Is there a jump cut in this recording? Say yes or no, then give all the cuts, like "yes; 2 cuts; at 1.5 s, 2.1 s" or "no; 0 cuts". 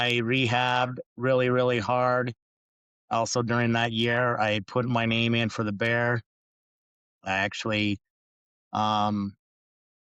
no; 0 cuts